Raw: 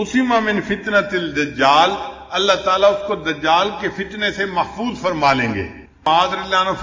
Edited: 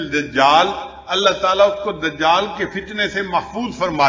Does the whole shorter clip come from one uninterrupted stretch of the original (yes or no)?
yes